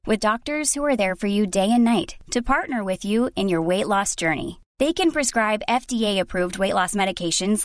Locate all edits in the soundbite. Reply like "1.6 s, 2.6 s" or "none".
none